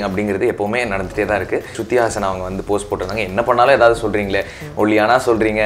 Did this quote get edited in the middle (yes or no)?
yes